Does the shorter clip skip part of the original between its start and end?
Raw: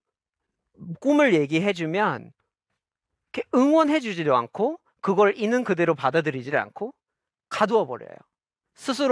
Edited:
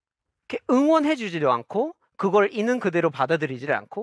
no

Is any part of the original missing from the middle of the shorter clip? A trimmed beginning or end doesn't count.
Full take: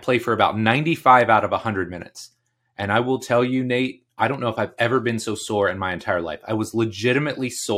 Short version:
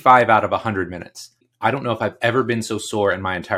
yes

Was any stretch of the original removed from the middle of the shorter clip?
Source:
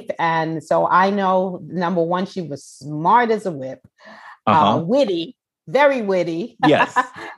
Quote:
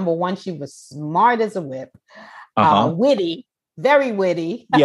no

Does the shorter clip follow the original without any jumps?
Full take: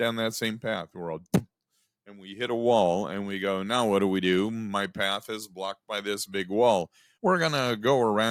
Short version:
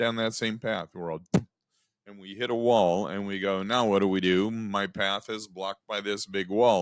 yes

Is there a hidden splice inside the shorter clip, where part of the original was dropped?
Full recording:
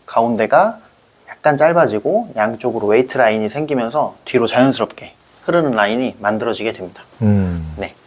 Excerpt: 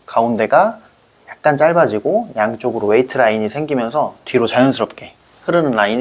no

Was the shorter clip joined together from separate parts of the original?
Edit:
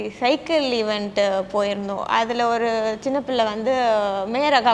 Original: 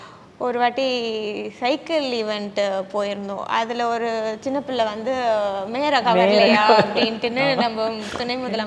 no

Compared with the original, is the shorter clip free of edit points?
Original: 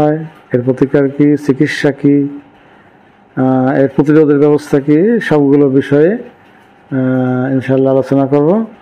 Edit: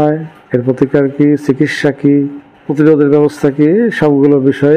no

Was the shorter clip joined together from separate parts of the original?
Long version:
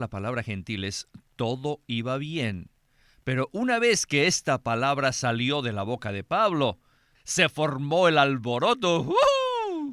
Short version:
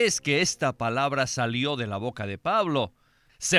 no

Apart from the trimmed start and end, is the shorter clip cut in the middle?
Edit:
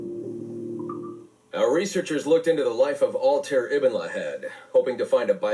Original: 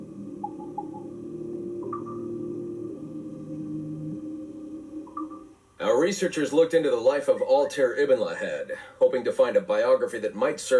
yes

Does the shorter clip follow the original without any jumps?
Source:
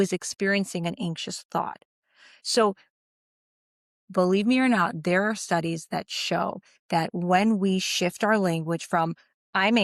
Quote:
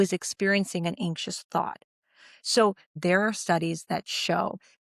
no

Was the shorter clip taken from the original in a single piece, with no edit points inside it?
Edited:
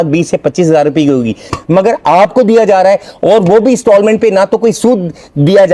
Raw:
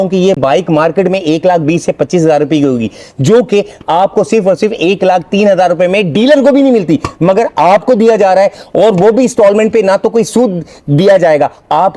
no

